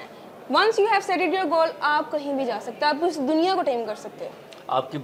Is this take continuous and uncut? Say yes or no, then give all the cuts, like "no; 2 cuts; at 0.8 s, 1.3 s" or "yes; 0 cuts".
yes; 0 cuts